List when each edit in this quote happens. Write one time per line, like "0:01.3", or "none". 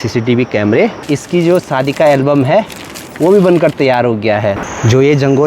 0:01.0
0:04.6